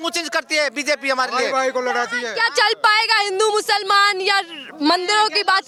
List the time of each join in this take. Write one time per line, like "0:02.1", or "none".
none